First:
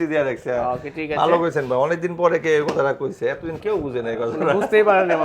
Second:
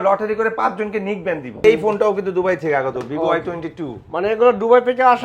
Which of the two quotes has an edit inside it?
second; 1 cut; at 1.6 s

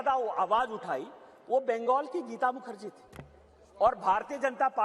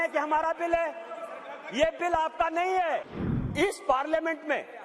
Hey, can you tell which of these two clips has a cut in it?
second; 1 cut; at 3.1 s

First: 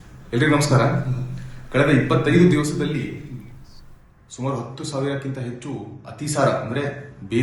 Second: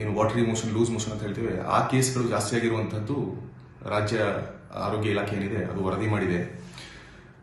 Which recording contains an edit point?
first; 1 cut; at 5.1 s

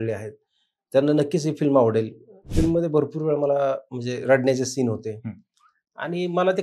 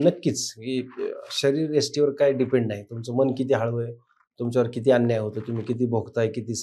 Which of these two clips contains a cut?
first; 1 cut; at 2.4 s

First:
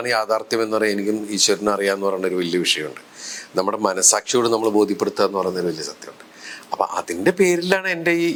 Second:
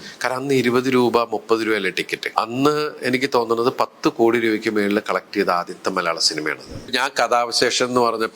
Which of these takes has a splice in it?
second; 2 cuts; at 2.2 s, 6.8 s

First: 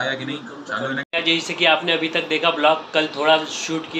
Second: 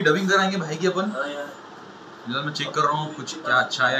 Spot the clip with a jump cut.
first; 1 cut; at 1.1 s

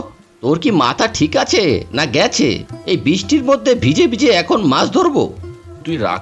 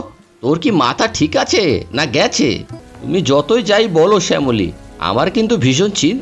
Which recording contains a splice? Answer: second; 1 cut; at 2.7 s

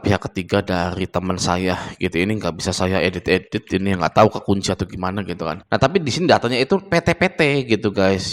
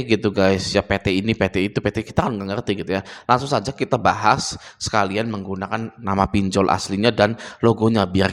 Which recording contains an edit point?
first; 1 cut; at 5.6 s

